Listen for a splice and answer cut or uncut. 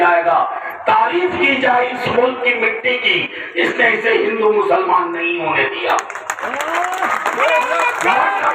uncut